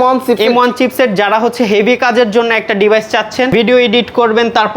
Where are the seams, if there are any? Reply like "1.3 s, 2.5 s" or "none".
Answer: 3.5 s